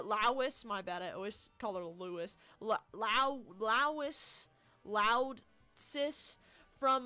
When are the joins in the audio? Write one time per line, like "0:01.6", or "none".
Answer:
0:01.1